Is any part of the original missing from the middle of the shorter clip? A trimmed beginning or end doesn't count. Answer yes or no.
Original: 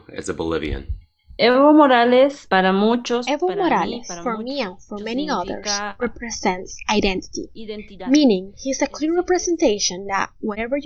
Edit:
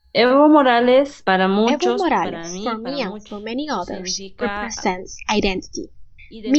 yes